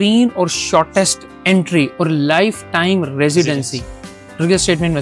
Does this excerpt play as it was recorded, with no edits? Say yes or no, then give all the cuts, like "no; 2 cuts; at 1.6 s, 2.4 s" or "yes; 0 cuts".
yes; 0 cuts